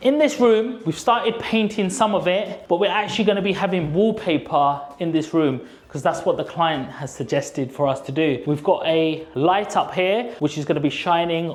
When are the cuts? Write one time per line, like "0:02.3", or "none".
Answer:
none